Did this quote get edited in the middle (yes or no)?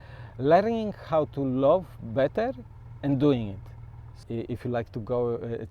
yes